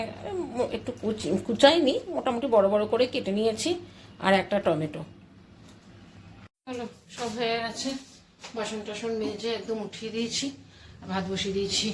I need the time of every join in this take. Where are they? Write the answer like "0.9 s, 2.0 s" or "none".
6.5 s